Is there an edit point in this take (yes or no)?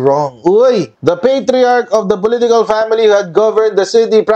yes